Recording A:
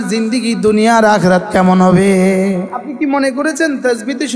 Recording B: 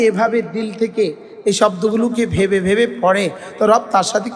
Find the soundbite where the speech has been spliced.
A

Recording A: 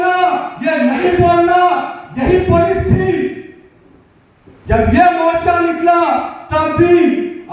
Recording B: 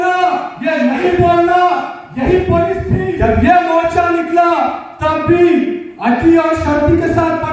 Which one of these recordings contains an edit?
B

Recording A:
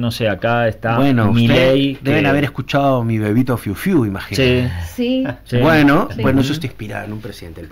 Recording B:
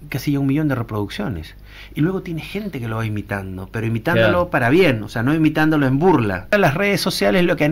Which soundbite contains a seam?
B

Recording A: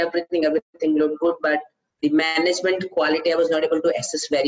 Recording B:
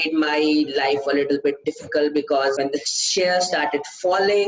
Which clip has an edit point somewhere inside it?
B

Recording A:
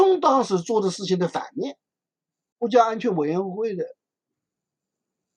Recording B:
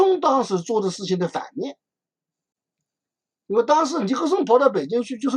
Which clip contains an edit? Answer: A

